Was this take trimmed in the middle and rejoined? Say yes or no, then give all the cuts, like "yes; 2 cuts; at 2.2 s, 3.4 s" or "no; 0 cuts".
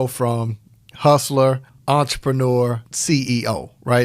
yes; 2 cuts; at 1.7 s, 2.9 s